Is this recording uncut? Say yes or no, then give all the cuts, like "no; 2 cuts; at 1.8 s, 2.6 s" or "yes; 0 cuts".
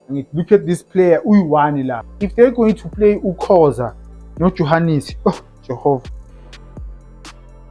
no; 1 cut; at 2.1 s